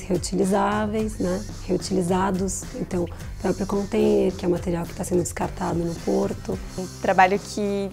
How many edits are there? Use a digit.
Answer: 1